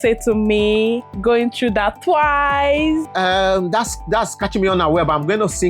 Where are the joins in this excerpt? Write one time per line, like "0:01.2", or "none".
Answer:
0:03.1